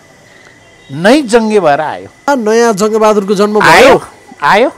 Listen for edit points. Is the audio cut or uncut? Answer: cut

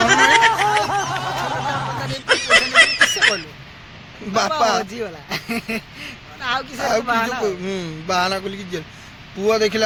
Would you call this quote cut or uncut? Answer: uncut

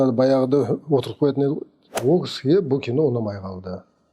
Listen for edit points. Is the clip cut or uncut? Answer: cut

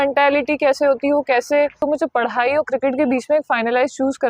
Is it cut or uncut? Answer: cut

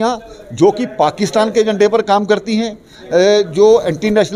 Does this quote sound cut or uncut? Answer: uncut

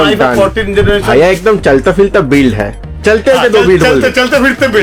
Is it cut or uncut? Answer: uncut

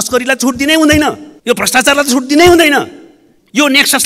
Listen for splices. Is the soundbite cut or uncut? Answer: cut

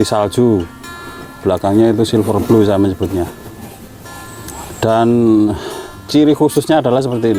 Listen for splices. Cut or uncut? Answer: uncut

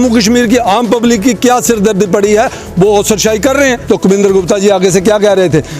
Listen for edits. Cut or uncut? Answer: cut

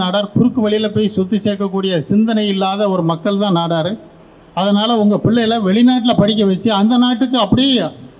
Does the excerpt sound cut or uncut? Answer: uncut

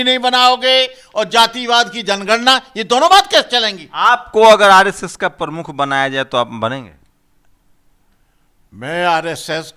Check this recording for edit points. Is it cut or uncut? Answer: uncut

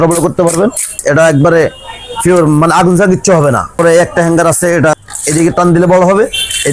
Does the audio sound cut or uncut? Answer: cut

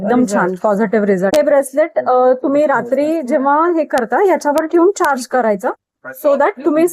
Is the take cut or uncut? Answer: cut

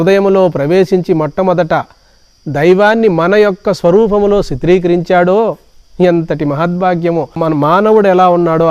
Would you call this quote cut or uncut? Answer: cut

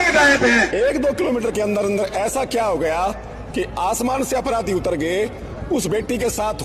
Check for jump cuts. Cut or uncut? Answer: uncut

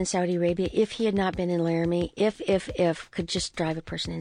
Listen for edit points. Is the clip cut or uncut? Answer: uncut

